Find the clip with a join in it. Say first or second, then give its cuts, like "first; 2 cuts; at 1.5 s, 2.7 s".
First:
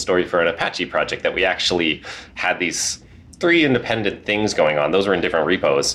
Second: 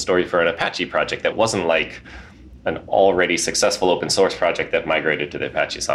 second; 1 cut; at 1.3 s